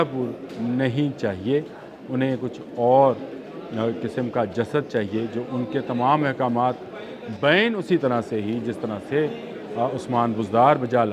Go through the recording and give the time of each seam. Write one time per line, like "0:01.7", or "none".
none

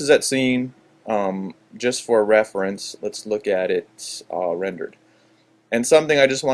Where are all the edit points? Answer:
0:01.6

